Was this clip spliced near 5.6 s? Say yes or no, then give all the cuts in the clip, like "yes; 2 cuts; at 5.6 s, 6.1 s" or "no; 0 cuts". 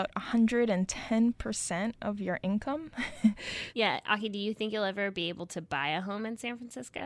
no; 1 cut; at 3.6 s